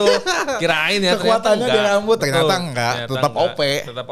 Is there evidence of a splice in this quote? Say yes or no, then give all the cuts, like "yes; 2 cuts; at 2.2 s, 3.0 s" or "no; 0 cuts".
no; 0 cuts